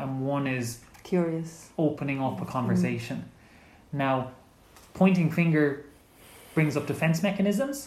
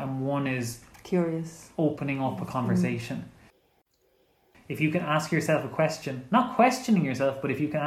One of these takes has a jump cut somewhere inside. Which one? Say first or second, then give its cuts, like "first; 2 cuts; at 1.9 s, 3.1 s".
second; 1 cut; at 3.9 s